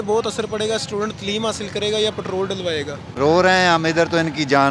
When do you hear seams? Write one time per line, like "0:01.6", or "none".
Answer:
0:03.2

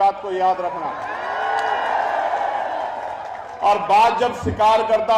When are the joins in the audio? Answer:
none

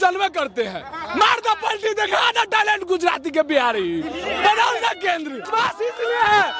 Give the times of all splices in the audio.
0:05.5

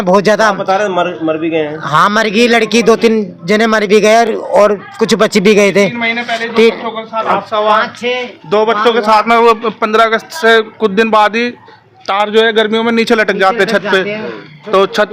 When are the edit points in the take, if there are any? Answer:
none

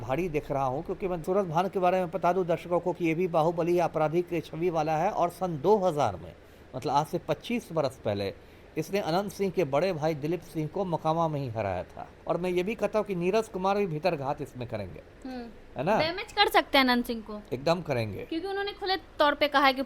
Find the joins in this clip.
0:01.2
0:12.1

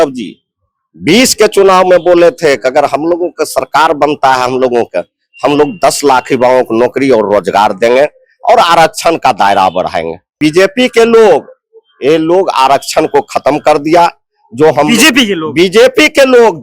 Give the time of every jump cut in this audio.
0:10.4

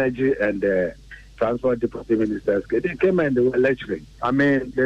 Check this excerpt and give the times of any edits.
none

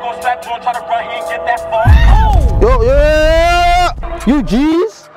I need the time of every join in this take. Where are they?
0:04.0

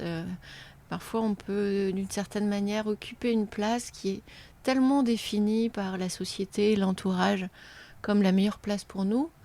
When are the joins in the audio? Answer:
none

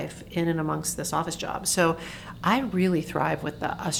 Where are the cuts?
none

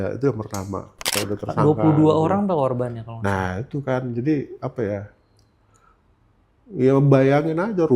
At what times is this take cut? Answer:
0:01.1

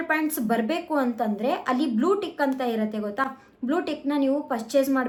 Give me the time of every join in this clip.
none

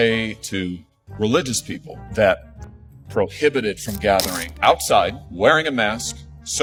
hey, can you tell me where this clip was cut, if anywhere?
none

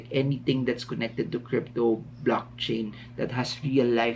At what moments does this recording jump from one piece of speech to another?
none

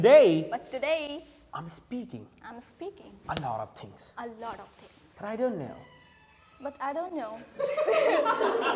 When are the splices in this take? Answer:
none

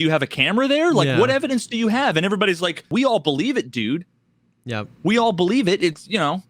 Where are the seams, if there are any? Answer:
0:02.8

